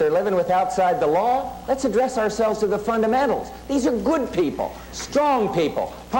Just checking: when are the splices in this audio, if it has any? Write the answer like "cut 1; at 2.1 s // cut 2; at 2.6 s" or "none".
none